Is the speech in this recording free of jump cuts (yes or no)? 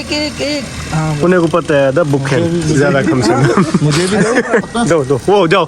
no